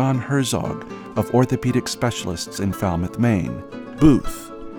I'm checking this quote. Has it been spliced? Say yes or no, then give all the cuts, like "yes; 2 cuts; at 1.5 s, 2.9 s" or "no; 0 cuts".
no; 0 cuts